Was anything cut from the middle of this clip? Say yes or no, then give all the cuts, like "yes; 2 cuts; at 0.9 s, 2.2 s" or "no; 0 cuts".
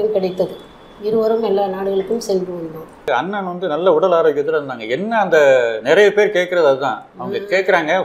yes; 1 cut; at 3.1 s